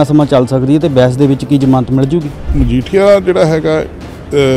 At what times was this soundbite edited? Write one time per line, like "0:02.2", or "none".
0:02.4